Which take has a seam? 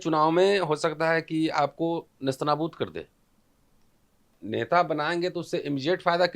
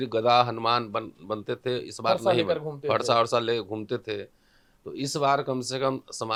first; 1 cut; at 4.4 s

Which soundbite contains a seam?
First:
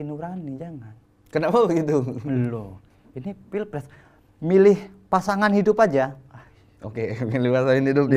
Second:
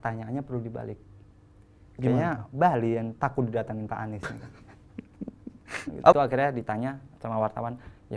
second; 1 cut; at 6.1 s

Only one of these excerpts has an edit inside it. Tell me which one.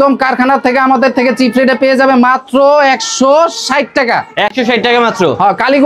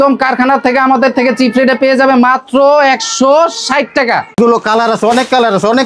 second; 1 cut; at 4.3 s

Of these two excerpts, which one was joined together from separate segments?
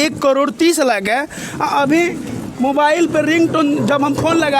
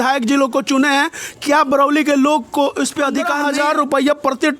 second; 1 cut; at 3.4 s

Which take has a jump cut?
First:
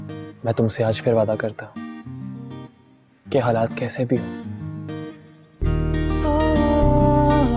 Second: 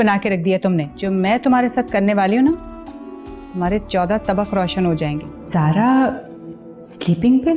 second; 2 cuts; at 0.9 s, 5.3 s

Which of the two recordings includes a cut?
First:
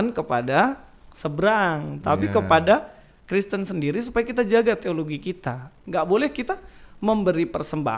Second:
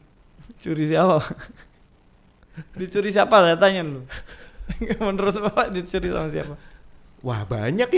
first; 1 cut; at 5.8 s

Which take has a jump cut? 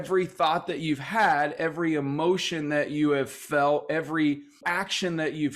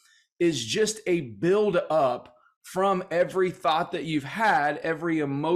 first; 1 cut; at 4.6 s

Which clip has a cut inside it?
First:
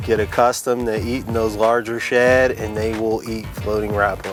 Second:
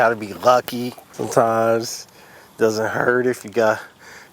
second; 1 cut; at 1.1 s

